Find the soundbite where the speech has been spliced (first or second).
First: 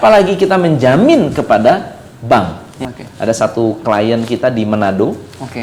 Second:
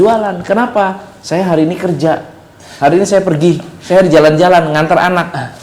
first